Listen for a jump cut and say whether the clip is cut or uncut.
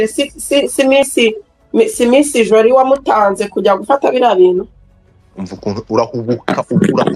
uncut